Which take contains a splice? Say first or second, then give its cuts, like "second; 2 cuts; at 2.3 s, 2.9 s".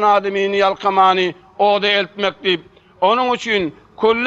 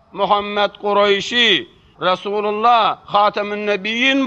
second; 1 cut; at 1.8 s